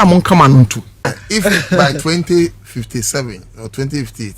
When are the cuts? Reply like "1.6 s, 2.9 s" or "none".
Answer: 1.2 s